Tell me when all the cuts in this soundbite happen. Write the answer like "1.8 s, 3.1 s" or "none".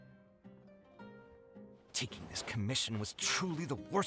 1.9 s